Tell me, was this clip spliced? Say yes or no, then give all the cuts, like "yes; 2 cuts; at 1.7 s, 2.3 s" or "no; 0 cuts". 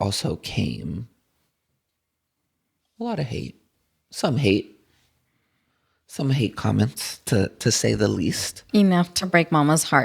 no; 0 cuts